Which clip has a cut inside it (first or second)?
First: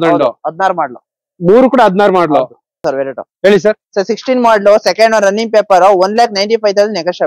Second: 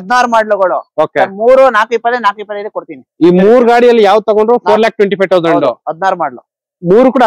first